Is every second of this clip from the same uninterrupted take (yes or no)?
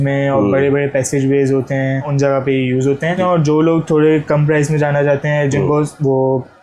no